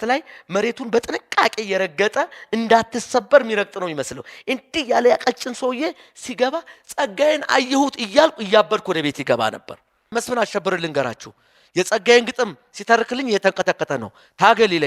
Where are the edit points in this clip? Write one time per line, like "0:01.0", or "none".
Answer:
0:10.1